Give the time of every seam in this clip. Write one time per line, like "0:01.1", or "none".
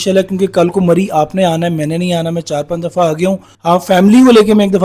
0:03.5